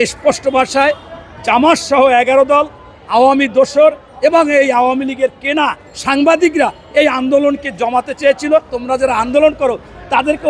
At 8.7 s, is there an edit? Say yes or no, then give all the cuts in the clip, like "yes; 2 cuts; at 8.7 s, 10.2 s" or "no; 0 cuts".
yes; 1 cut; at 8.7 s